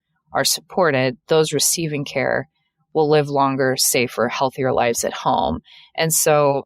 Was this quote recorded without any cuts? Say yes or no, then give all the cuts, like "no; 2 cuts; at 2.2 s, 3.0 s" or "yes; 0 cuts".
yes; 0 cuts